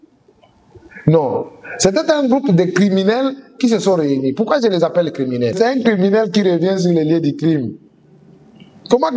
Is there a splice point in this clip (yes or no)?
yes